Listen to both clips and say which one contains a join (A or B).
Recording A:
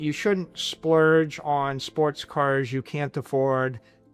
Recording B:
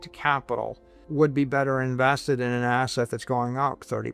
B